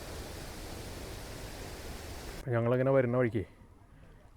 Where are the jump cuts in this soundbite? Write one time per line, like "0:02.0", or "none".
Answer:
0:02.4